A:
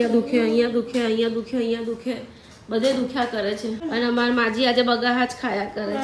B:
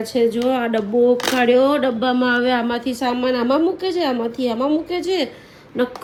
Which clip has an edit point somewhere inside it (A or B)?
A